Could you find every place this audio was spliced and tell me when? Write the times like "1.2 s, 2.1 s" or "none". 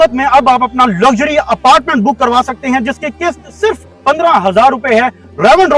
none